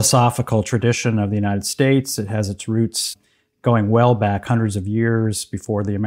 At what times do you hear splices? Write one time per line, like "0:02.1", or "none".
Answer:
0:03.2